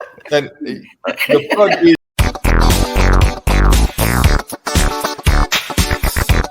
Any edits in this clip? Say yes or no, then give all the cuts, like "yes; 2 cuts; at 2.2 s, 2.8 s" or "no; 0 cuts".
yes; 1 cut; at 2.0 s